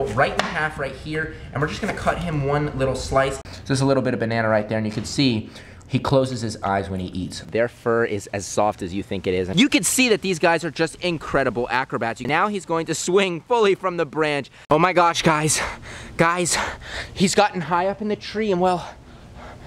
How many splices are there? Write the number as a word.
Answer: five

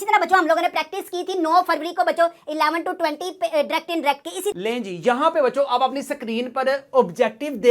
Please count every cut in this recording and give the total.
one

